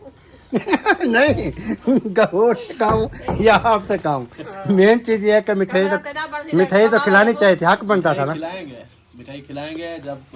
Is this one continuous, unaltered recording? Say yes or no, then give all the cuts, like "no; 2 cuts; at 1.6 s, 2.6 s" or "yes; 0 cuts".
yes; 0 cuts